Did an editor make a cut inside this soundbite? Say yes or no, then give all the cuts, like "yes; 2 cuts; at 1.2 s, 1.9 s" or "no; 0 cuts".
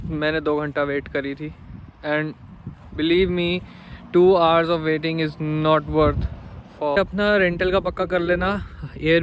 yes; 1 cut; at 7.0 s